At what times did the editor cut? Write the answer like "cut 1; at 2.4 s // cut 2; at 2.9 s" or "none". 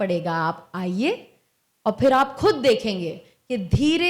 none